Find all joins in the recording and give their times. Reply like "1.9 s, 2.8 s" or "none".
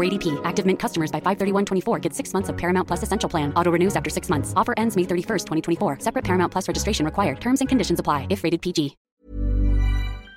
9.0 s